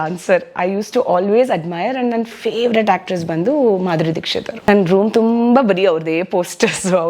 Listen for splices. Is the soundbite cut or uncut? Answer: cut